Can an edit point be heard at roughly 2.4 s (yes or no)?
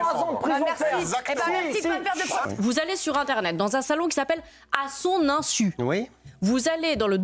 yes